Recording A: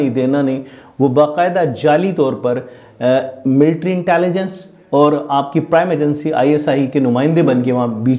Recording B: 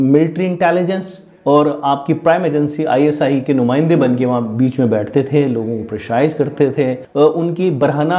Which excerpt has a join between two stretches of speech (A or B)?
B